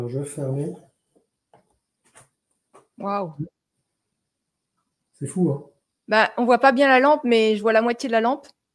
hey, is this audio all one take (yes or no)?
yes